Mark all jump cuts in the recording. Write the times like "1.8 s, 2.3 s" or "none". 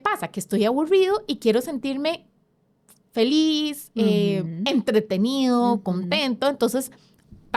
none